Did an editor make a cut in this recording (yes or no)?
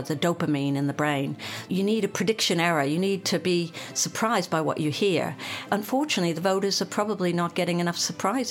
yes